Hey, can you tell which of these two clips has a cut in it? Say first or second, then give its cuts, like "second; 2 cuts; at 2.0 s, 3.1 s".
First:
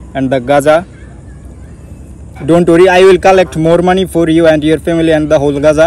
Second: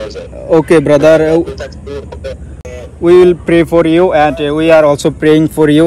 second; 1 cut; at 2.6 s